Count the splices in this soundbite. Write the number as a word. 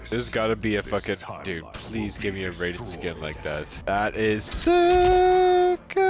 one